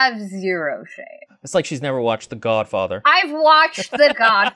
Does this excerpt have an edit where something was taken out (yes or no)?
no